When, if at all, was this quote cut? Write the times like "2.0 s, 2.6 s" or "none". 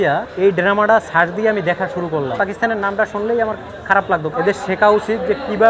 2.3 s, 4.3 s